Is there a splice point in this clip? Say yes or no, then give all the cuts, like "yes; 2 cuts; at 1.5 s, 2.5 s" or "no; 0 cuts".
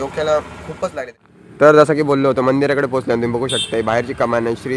yes; 1 cut; at 1.0 s